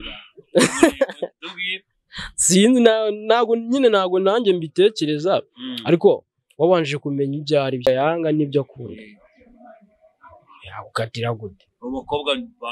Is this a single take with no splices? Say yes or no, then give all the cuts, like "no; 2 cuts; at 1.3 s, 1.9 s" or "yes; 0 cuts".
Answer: yes; 0 cuts